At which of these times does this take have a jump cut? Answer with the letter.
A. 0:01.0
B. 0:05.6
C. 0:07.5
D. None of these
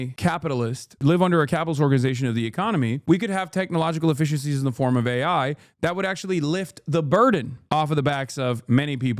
A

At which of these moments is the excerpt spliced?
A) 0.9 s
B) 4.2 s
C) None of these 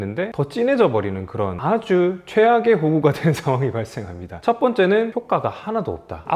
B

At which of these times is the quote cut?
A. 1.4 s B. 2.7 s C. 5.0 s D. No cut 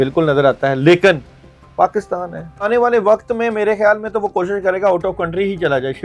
B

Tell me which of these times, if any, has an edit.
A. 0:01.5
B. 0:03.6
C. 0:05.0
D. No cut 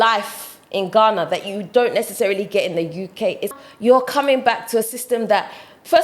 B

